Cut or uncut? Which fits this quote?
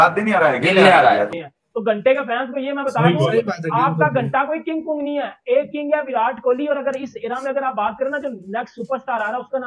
cut